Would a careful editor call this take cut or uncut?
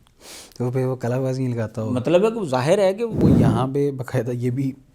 cut